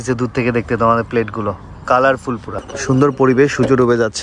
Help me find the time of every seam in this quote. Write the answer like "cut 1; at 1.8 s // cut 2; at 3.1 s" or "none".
cut 1; at 2.7 s